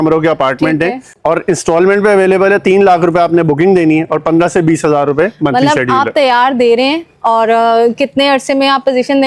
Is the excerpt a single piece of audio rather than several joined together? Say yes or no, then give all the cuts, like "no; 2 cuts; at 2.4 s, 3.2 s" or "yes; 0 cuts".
no; 1 cut; at 1.1 s